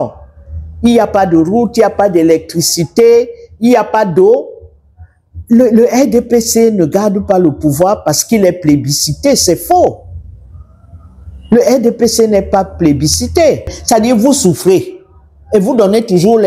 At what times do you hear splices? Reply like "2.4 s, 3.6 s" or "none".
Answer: 13.8 s